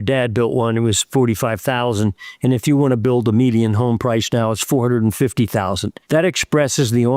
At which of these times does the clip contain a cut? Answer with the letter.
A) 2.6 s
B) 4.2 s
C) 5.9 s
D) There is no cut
C